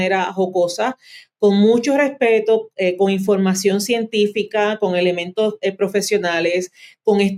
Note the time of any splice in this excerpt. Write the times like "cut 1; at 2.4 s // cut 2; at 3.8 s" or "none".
none